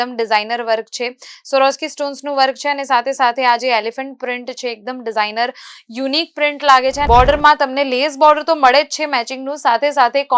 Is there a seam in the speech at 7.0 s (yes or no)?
yes